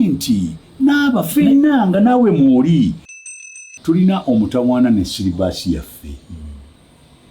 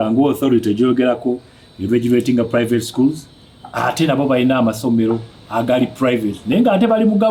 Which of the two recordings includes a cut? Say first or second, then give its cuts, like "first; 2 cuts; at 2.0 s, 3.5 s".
first; 1 cut; at 3.3 s